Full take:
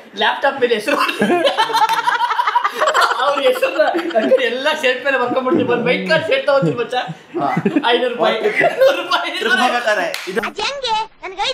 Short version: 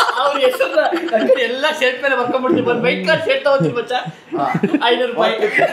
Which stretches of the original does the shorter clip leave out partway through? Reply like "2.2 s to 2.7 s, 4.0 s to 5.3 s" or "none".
none